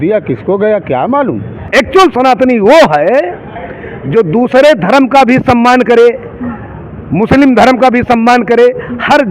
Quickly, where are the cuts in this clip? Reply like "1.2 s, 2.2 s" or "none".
1.6 s